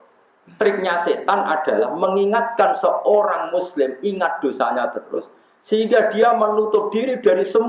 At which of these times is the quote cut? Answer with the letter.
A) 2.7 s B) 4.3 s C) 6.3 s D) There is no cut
D